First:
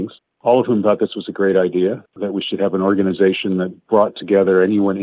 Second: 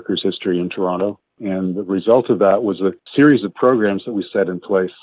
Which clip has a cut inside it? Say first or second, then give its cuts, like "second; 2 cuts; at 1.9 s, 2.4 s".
second; 1 cut; at 1.3 s